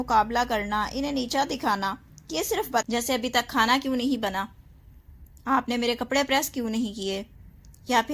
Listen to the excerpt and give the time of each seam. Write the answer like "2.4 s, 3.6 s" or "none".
2.9 s

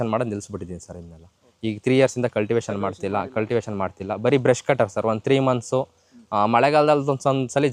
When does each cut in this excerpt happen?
none

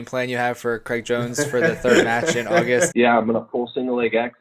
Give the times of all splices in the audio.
2.9 s

